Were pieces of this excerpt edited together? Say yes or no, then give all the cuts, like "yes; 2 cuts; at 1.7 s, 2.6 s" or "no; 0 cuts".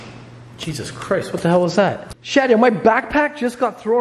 yes; 1 cut; at 2.1 s